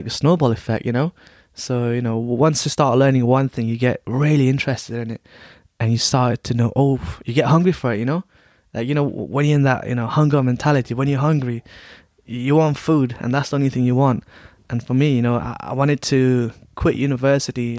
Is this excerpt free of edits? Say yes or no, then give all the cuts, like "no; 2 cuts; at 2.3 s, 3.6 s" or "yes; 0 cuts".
yes; 0 cuts